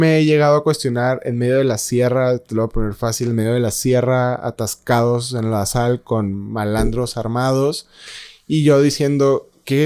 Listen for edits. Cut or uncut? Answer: uncut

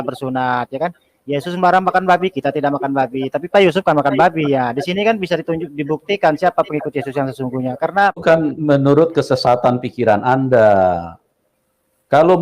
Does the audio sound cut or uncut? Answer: cut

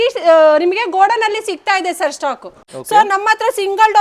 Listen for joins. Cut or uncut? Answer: cut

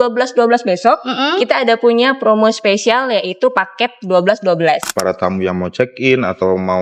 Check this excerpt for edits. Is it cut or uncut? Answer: cut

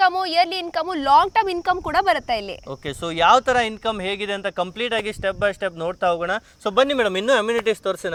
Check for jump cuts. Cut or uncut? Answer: uncut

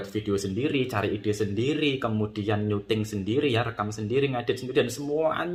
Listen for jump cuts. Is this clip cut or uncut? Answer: uncut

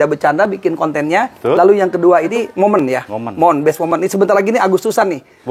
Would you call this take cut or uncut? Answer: cut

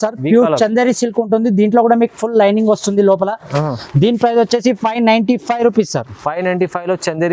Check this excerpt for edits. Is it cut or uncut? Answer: uncut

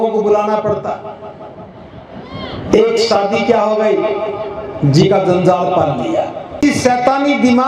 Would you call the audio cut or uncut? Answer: cut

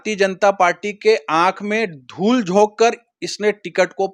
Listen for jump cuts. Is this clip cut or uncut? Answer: uncut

